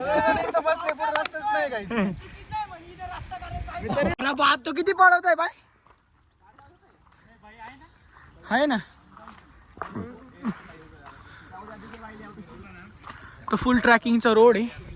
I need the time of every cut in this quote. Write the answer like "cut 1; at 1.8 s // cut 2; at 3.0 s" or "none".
cut 1; at 4.2 s